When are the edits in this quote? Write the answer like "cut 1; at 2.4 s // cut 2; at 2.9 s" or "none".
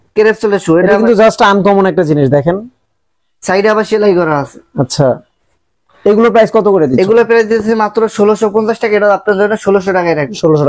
none